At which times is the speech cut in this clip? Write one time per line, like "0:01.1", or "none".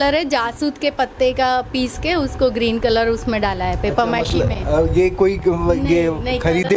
none